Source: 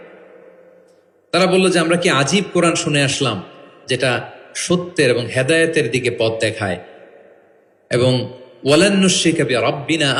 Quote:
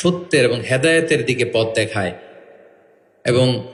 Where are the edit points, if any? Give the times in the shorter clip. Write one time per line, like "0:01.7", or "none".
none

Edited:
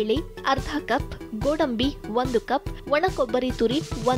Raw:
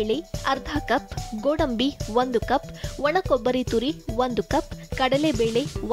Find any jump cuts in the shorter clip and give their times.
0:02.7

